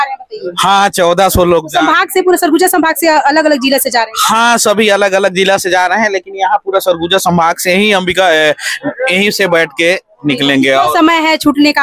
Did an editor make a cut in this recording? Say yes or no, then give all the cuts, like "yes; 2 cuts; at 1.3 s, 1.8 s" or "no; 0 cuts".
no; 0 cuts